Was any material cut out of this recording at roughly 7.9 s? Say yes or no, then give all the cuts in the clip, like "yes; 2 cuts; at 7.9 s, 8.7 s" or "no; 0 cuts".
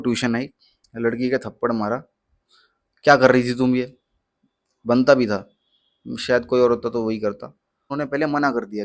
yes; 1 cut; at 7.9 s